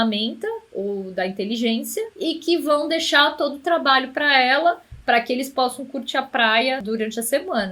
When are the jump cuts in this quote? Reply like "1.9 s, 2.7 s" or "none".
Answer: 2.1 s, 6.8 s